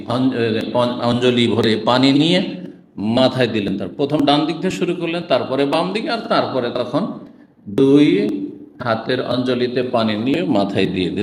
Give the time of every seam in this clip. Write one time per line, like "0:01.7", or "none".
none